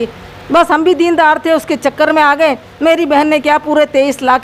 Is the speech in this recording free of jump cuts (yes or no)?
yes